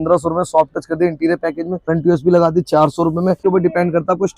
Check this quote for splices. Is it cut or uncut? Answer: cut